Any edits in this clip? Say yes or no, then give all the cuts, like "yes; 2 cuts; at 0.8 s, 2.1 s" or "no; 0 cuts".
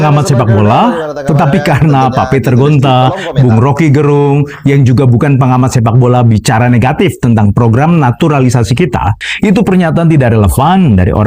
yes; 1 cut; at 9.2 s